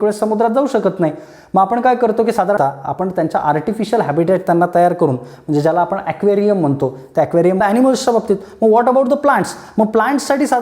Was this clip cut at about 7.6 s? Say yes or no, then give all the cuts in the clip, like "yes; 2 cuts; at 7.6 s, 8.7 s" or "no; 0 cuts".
yes; 2 cuts; at 2.6 s, 7.6 s